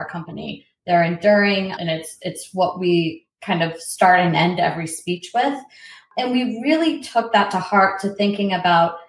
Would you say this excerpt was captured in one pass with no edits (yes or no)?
no